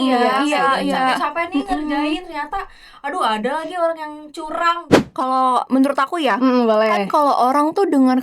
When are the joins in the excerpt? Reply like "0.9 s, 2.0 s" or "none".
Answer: 4.9 s